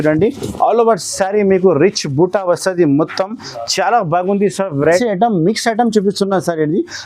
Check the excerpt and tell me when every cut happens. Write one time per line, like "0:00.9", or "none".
0:04.9